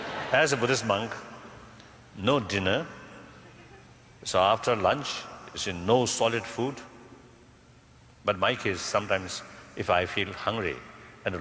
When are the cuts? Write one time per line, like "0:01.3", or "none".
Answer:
0:03.4